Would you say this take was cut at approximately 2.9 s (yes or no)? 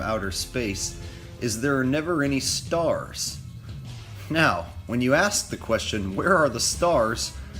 yes